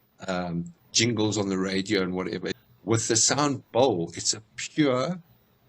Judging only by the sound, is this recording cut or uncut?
cut